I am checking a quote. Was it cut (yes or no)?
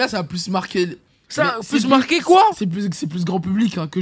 no